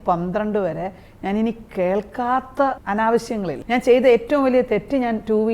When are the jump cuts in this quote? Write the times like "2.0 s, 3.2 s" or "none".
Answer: 2.8 s, 3.6 s